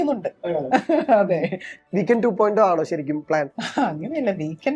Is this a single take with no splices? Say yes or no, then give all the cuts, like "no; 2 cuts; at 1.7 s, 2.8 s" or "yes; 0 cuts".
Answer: no; 2 cuts; at 1.6 s, 3.6 s